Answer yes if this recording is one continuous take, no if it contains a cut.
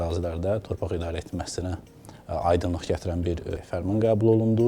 no